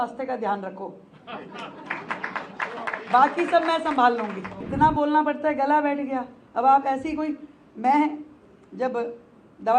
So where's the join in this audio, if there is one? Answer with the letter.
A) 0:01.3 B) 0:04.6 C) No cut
B